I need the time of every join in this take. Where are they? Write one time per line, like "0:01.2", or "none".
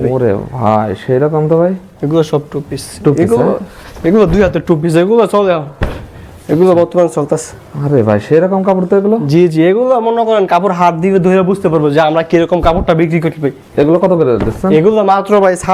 none